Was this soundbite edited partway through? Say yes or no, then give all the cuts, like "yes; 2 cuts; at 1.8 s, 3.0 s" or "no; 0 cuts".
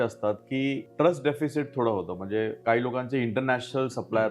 yes; 2 cuts; at 0.8 s, 2.6 s